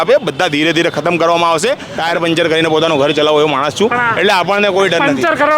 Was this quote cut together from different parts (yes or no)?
yes